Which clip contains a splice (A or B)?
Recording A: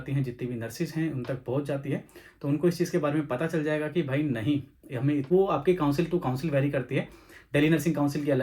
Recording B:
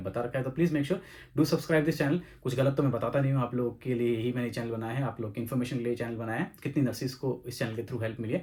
A